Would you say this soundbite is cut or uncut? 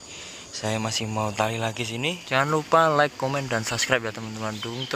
cut